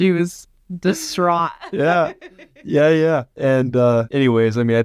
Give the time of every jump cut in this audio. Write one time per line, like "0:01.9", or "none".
0:03.3
0:04.1